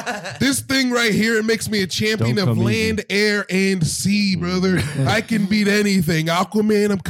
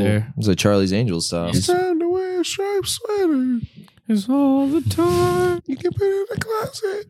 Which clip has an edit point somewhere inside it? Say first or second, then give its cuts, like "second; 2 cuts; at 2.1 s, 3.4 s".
second; 2 cuts; at 1.5 s, 5.5 s